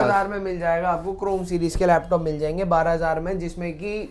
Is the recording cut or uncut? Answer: uncut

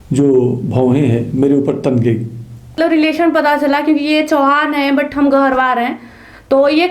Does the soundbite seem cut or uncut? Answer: cut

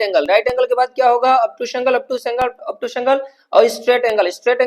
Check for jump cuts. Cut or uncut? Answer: uncut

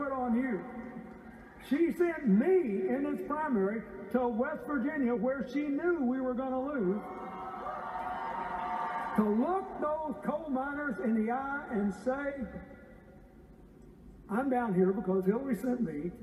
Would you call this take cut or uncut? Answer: uncut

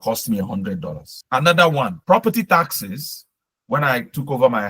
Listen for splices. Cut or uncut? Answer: cut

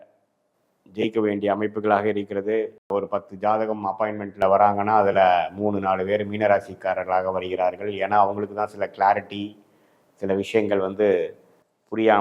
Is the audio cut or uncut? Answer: cut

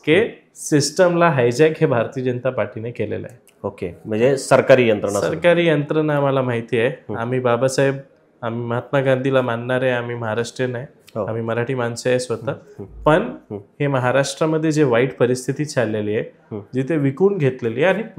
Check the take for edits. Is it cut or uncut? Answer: uncut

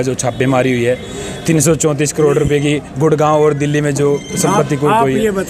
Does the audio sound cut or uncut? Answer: uncut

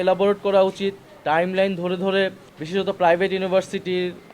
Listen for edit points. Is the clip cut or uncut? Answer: cut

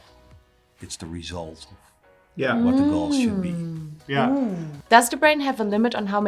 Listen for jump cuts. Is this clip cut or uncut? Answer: cut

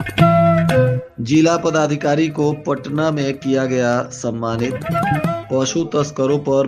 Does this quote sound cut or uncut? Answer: cut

